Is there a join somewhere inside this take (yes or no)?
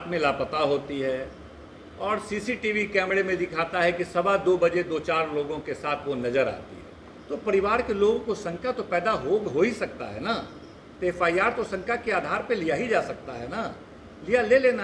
no